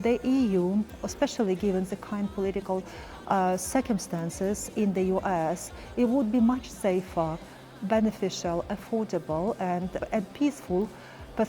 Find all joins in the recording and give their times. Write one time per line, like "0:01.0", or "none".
0:10.0